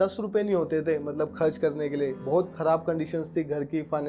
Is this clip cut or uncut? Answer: uncut